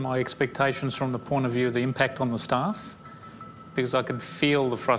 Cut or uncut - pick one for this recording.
cut